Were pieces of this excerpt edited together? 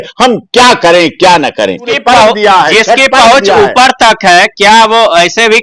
yes; 1 cut; at 1.9 s

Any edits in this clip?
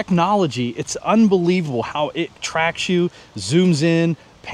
no; 0 cuts

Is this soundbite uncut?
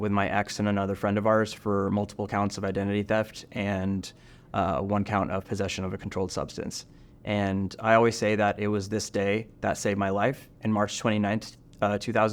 yes; 0 cuts

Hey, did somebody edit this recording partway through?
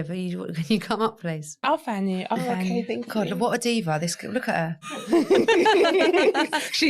yes; 2 cuts; at 1.6 s, 4.9 s

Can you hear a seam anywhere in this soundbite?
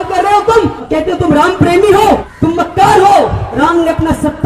yes; 3 cuts; at 0.8 s, 2.3 s, 3.4 s

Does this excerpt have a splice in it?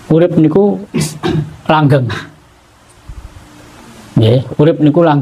no; 0 cuts

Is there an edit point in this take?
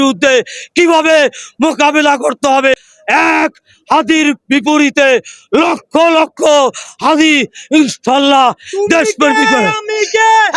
no; 0 cuts

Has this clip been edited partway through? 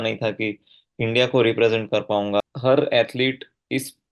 yes; 1 cut; at 2.4 s

